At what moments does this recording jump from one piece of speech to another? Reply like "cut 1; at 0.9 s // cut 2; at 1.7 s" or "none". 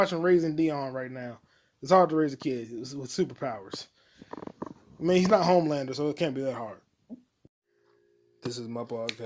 cut 1; at 7.6 s